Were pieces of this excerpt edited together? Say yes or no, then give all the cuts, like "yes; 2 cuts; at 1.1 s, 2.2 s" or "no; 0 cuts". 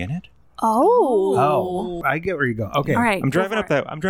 yes; 1 cut; at 2.0 s